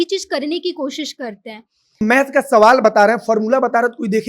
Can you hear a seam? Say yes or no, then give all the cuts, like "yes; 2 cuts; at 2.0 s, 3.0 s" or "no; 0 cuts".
yes; 1 cut; at 2.0 s